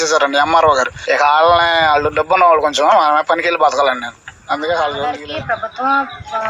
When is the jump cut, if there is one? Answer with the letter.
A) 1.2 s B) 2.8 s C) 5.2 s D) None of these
C